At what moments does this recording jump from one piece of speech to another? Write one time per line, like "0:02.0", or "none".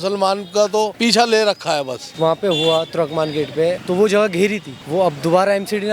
0:00.9
0:02.0
0:03.8
0:04.7